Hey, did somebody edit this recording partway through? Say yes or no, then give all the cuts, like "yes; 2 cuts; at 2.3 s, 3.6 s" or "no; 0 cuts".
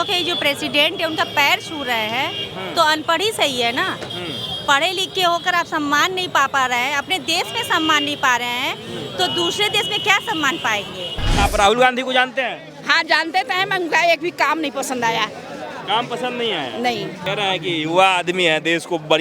yes; 2 cuts; at 11.4 s, 17.2 s